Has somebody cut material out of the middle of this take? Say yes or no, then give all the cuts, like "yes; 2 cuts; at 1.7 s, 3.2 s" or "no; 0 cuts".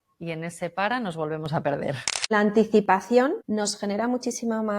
yes; 2 cuts; at 2.3 s, 3.4 s